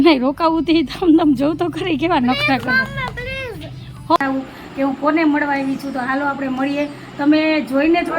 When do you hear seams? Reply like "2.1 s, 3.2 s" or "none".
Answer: 4.2 s